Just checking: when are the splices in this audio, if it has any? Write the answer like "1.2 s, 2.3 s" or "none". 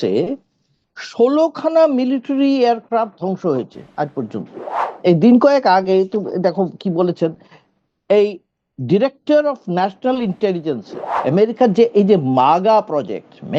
4.9 s, 11.1 s